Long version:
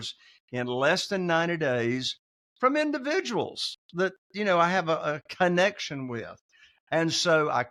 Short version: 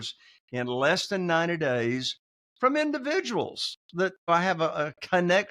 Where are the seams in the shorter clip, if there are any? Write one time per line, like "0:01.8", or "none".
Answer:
0:04.3